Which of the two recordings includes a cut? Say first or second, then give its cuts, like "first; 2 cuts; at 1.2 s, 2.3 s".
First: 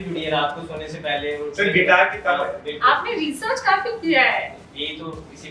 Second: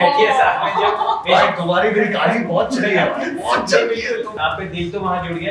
second; 1 cut; at 4.3 s